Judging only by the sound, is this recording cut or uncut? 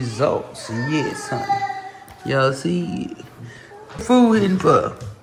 uncut